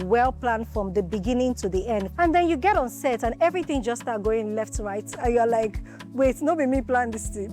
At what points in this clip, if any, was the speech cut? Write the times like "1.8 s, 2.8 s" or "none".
2.1 s